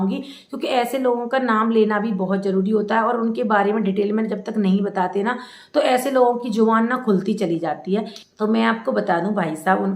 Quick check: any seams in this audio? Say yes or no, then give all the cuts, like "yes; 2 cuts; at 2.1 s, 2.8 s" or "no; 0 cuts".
yes; 1 cut; at 8.2 s